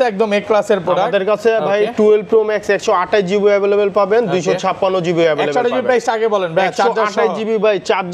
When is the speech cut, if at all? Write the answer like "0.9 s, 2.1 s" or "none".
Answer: none

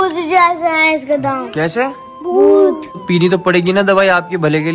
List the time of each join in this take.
3.0 s

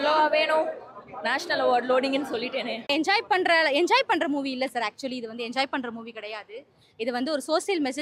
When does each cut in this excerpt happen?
2.9 s

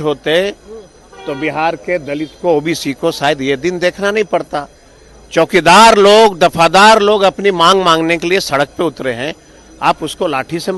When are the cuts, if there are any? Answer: none

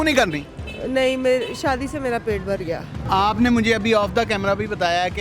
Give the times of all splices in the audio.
2.9 s

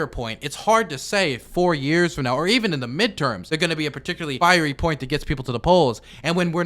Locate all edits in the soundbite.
3.8 s

